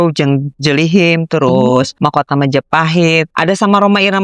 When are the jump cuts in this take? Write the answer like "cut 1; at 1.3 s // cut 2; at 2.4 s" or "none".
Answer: cut 1; at 1.9 s // cut 2; at 3.3 s